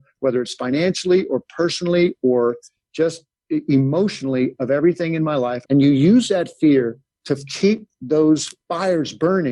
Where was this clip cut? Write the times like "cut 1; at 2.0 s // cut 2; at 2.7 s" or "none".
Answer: cut 1; at 5.6 s // cut 2; at 8.6 s